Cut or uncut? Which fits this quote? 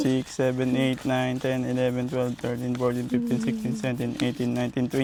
uncut